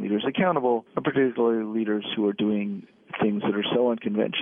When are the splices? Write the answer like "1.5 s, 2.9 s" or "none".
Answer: 0.9 s